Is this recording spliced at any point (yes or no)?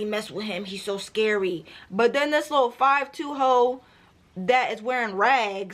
no